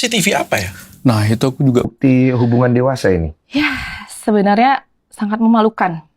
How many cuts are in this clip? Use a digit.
1